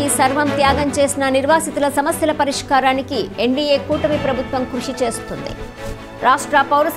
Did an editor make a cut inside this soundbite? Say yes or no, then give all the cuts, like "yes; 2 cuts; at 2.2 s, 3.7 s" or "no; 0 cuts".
no; 0 cuts